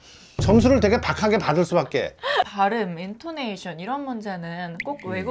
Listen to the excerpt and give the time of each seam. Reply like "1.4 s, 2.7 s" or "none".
2.5 s